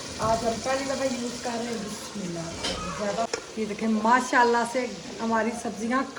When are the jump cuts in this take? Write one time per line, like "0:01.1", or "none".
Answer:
0:03.3

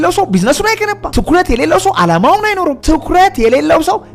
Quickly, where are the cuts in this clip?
0:02.8

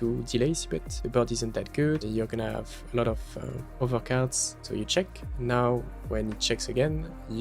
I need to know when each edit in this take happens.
0:00.9
0:02.0
0:03.6
0:04.5

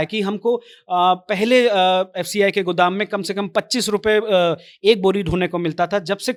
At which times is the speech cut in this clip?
none

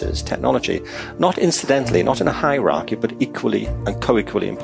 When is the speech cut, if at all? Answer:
0:03.7

